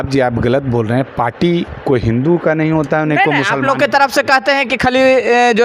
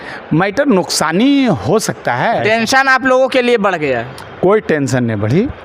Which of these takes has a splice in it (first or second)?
second